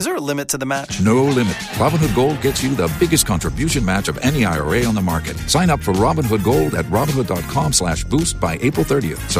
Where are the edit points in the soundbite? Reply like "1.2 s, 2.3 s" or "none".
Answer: none